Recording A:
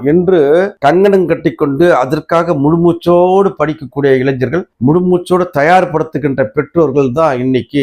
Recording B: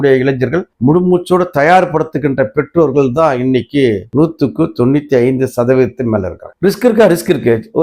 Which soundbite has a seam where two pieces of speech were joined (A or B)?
B